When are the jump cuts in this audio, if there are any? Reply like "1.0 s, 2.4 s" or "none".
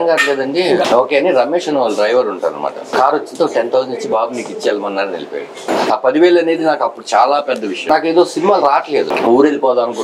0.9 s, 2.8 s, 5.8 s, 7.8 s, 9.1 s